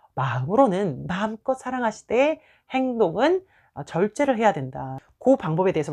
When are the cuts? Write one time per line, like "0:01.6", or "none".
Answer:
0:04.9